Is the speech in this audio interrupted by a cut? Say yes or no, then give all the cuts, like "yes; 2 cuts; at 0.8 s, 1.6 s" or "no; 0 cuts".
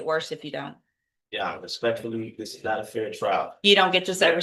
no; 0 cuts